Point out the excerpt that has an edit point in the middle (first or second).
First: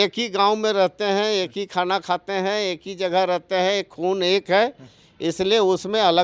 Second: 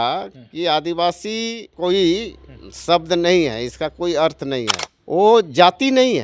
second